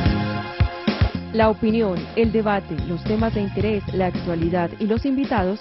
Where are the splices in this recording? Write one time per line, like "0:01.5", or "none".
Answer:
0:01.0